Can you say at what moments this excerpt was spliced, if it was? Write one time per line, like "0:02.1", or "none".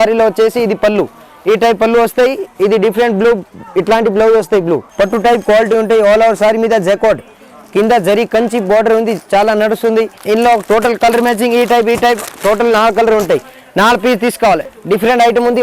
0:04.9
0:10.2
0:14.7